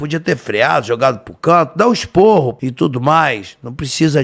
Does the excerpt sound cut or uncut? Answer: cut